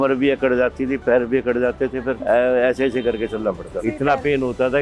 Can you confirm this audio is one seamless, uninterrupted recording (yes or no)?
no